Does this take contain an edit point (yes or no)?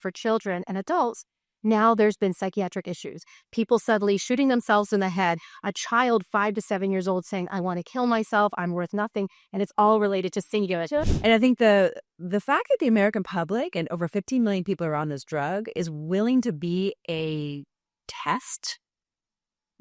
yes